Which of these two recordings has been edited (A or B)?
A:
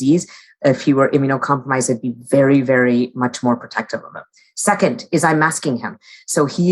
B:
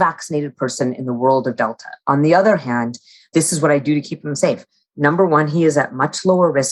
B